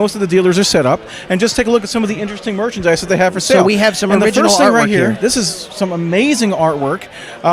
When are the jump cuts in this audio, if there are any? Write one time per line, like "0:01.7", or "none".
0:06.2